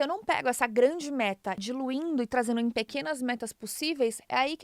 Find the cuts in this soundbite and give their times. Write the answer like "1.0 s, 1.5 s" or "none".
1.6 s